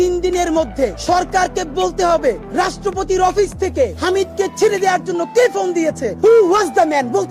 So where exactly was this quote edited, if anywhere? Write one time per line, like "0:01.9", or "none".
0:01.0
0:02.4
0:04.0
0:06.1

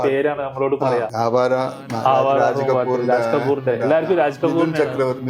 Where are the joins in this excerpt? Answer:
0:01.1

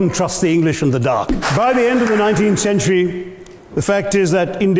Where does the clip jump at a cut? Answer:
0:01.4

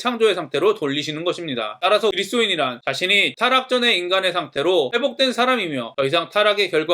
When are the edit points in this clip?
0:02.1
0:03.3

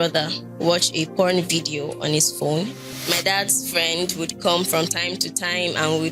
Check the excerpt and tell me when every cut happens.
0:02.9

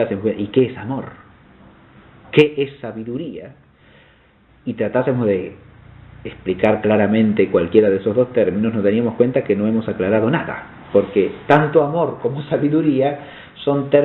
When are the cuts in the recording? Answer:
0:07.1

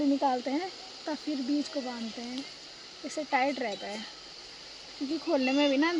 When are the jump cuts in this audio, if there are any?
none

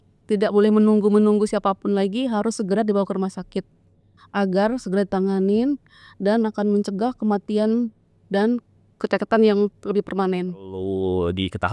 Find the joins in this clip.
0:10.8

